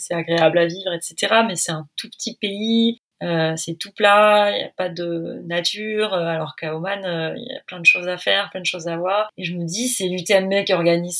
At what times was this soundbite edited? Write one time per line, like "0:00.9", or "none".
0:03.1
0:09.4